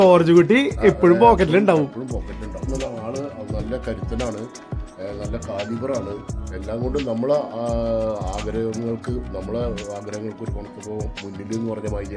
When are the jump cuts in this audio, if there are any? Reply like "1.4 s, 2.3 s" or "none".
2.7 s